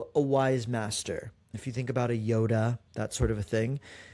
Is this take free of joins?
no; 1 cut; at 1.5 s

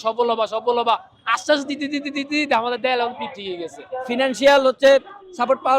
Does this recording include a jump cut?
yes; 1 cut; at 4.1 s

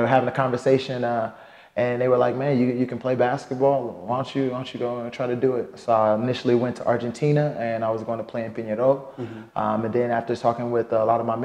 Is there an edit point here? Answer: no; 0 cuts

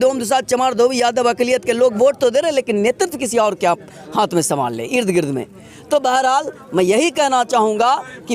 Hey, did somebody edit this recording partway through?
no; 0 cuts

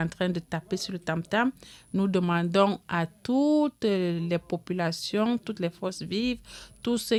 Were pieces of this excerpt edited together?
no; 0 cuts

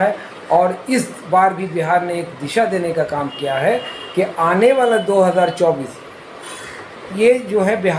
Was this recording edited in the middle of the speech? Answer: no; 0 cuts

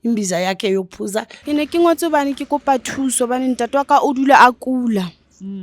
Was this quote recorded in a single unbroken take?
no; 1 cut; at 1.4 s

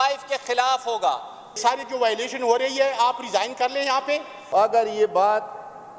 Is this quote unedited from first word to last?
no; 2 cuts; at 1.6 s, 4.3 s

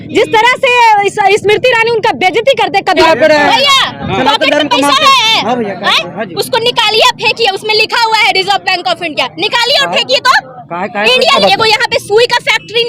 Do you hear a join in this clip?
yes; 2 cuts; at 3.0 s, 11.4 s

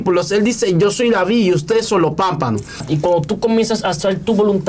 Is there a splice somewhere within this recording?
yes; 1 cut; at 2.8 s

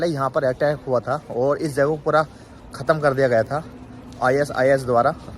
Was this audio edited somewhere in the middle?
no; 0 cuts

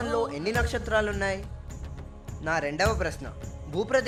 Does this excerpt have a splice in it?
no; 0 cuts

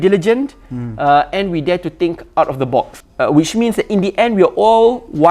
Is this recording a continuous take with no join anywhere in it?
no; 1 cut; at 3.0 s

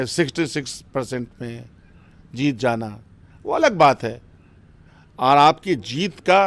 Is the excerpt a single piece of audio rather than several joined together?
yes; 0 cuts

